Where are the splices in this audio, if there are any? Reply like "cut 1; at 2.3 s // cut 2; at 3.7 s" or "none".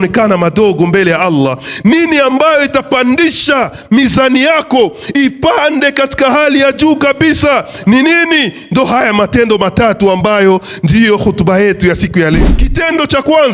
cut 1; at 12.5 s